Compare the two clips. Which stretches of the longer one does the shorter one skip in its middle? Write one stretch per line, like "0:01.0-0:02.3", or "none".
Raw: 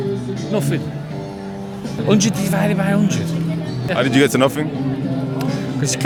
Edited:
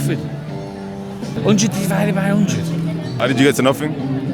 0:03.8-0:03.9